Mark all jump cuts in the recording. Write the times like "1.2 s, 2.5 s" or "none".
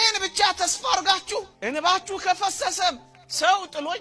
1.5 s